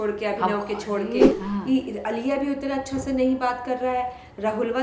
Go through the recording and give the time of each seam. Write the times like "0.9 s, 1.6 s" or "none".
1.3 s